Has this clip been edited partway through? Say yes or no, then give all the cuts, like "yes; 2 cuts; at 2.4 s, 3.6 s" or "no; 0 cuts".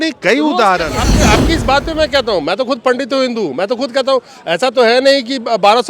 yes; 1 cut; at 1.1 s